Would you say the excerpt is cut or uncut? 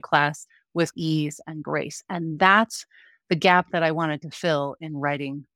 cut